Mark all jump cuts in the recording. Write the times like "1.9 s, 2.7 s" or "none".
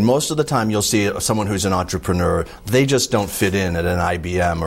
none

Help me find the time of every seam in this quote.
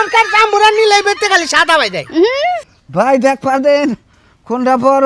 2.7 s

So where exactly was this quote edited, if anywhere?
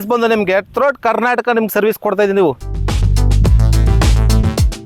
2.6 s

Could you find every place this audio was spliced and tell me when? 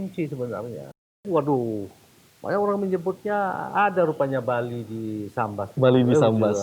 1.2 s

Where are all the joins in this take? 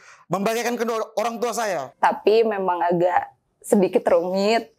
1.8 s

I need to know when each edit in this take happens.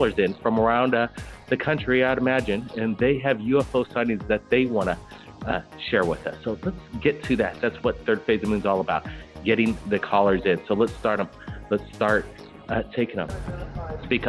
5.2 s

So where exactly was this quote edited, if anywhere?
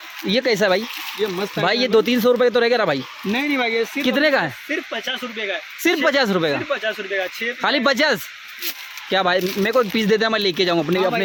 none

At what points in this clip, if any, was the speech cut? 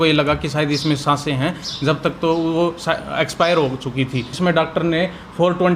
4.3 s

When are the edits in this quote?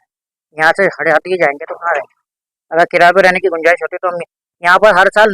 none

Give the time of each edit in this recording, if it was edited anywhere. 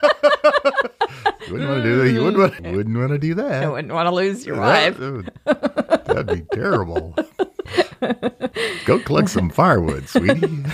7.6 s

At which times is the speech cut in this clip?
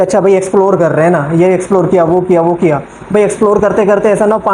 none

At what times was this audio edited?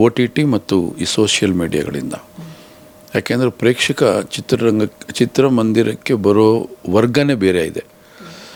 none

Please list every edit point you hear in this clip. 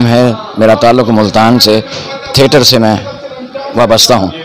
none

